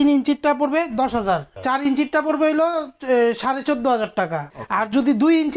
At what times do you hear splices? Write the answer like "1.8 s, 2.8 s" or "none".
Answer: 1.5 s, 4.5 s